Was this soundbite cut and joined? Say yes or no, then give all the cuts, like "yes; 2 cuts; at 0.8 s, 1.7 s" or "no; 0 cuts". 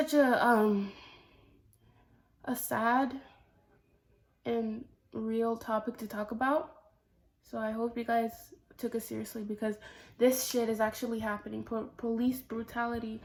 no; 0 cuts